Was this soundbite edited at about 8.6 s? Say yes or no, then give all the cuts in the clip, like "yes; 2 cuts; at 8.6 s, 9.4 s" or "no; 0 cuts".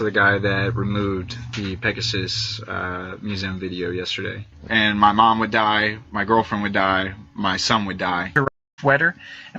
yes; 1 cut; at 8.6 s